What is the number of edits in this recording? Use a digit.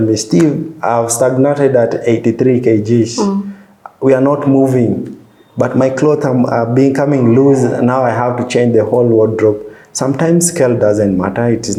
0